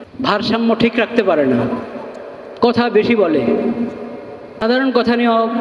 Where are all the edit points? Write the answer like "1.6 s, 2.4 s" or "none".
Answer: 4.6 s

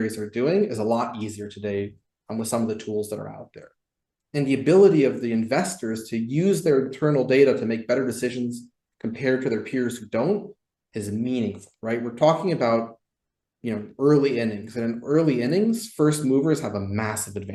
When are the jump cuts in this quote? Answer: none

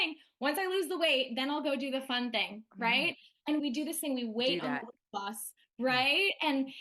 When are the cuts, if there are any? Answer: 3.6 s

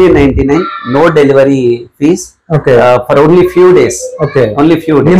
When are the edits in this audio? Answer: none

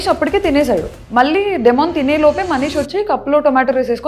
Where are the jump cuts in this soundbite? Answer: 1.0 s

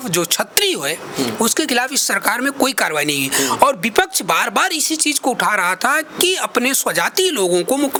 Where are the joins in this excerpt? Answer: none

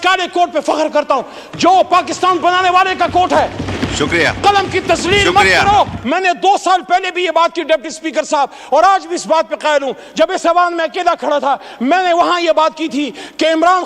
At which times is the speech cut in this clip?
6.0 s

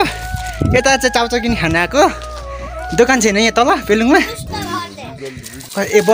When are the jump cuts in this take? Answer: none

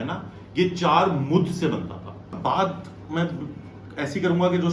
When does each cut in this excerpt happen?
2.3 s

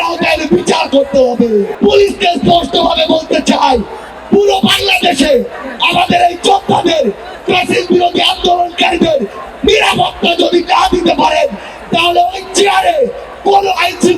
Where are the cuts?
1.7 s

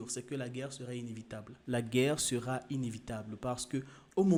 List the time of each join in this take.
none

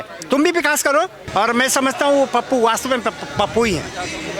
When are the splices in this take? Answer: 1.2 s

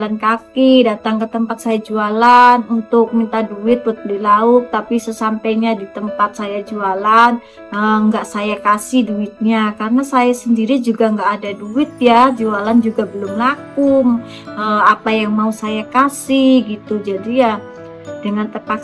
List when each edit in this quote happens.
none

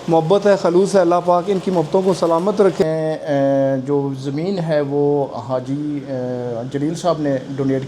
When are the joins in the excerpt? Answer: 2.8 s

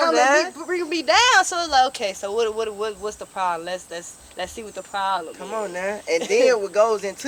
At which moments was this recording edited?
none

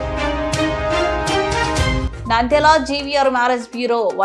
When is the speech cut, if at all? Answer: 2.0 s

